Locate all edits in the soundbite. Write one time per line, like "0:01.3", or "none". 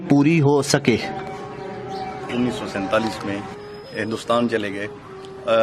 0:02.3